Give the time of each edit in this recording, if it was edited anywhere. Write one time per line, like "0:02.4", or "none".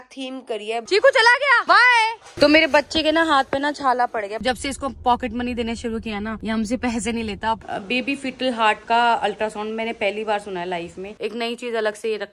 0:00.8
0:04.4
0:07.6
0:11.1